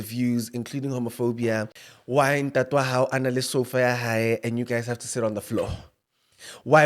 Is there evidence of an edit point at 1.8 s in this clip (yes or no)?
yes